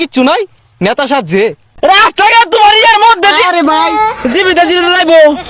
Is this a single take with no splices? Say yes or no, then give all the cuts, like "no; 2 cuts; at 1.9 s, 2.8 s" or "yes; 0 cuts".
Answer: no; 1 cut; at 1.6 s